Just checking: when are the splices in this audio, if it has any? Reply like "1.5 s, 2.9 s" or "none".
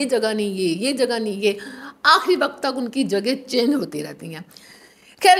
none